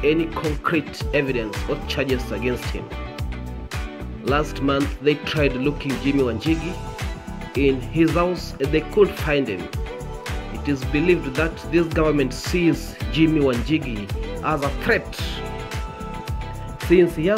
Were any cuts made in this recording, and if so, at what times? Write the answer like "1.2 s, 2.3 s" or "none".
3.1 s, 4.2 s